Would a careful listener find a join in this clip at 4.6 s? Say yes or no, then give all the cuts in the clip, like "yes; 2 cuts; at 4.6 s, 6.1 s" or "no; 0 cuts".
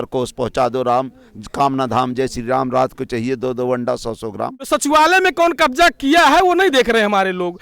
yes; 1 cut; at 4.6 s